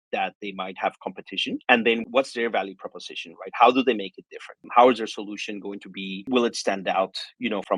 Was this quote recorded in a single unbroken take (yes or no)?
yes